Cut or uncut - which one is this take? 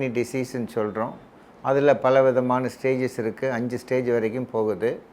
uncut